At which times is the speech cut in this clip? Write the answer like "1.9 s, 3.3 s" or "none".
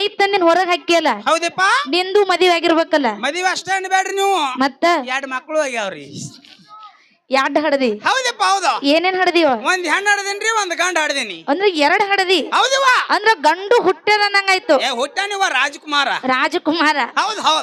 none